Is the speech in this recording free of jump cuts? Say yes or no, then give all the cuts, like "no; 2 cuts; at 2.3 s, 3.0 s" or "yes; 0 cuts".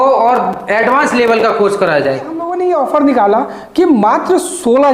no; 1 cut; at 2.5 s